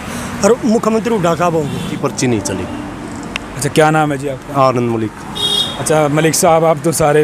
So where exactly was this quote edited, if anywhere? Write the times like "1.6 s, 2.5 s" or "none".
1.9 s